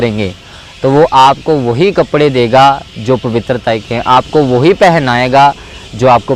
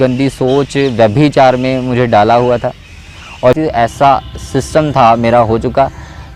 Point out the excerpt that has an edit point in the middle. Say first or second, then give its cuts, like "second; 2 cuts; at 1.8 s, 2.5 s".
second; 1 cut; at 3.5 s